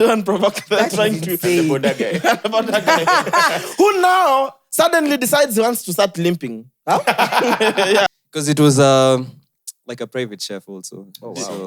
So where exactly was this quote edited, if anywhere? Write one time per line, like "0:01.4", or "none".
0:08.1